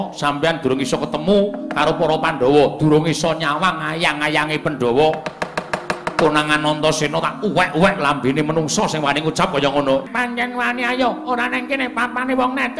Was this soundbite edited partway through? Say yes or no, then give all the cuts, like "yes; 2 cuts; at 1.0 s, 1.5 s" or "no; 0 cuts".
yes; 1 cut; at 10.1 s